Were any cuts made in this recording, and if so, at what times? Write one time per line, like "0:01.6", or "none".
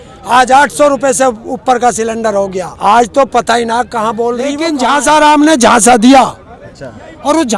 0:02.7
0:04.7